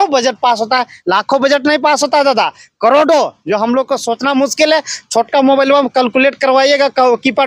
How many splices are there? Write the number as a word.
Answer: zero